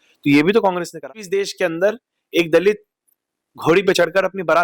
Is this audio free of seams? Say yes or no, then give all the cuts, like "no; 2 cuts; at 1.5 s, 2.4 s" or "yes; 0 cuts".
no; 1 cut; at 1.0 s